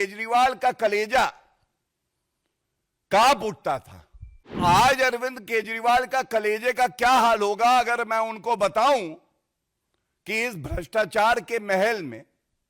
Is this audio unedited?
no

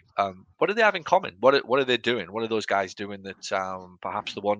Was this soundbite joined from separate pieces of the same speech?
no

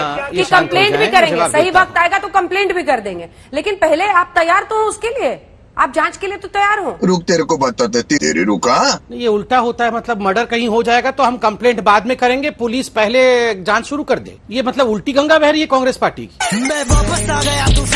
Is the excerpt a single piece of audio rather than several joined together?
yes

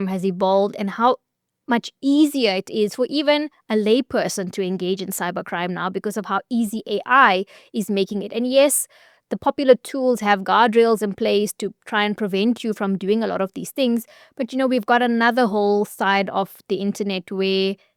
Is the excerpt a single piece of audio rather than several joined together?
yes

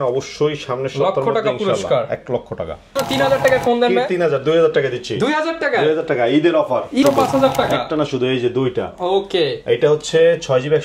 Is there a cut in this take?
yes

